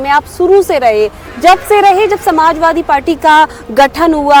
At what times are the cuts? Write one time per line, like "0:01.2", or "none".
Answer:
none